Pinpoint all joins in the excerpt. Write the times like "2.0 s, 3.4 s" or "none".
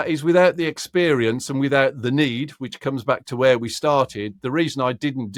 none